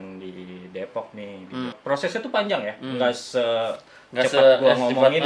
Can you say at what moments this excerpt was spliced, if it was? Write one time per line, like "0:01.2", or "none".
0:01.7